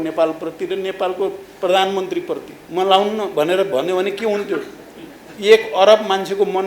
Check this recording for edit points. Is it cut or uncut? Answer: cut